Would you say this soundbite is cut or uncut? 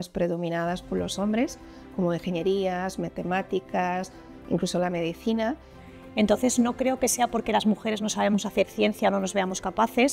uncut